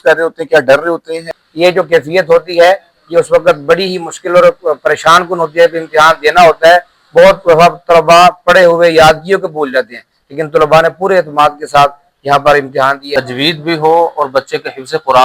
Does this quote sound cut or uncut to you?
cut